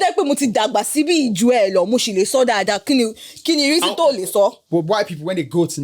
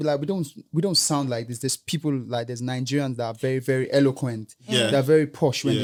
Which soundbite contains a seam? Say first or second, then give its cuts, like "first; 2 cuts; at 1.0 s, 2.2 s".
first; 1 cut; at 4.6 s